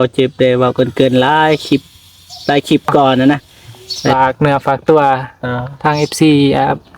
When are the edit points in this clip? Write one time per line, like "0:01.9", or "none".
0:04.1